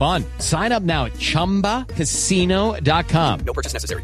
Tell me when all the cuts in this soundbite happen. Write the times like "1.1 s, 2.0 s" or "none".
none